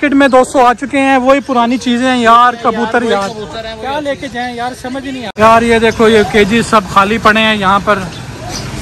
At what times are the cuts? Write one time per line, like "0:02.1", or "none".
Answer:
0:05.3

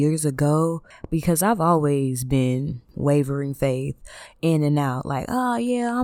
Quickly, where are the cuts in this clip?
0:00.9
0:02.8

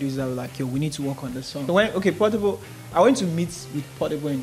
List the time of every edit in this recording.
0:01.6

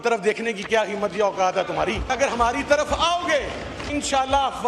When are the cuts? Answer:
none

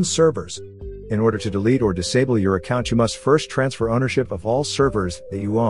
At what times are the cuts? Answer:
none

